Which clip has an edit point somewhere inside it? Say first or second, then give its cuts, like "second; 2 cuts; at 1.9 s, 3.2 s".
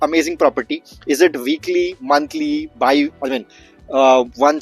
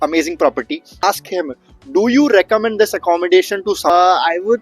second; 2 cuts; at 0.9 s, 3.9 s